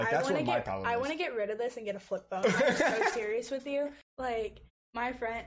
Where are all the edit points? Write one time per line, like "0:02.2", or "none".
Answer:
0:04.1

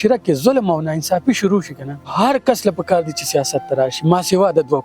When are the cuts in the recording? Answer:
0:02.1

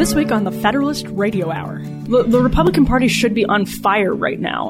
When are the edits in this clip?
0:02.0

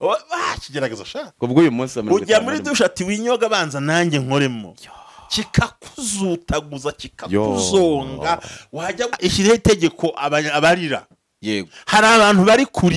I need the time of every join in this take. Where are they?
0:09.1

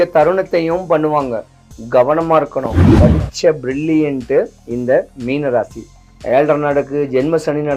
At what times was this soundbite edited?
0:02.8
0:04.6

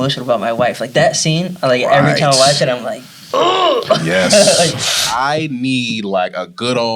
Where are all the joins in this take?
0:05.0

